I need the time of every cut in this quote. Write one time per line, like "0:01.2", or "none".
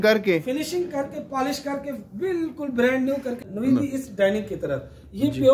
0:03.4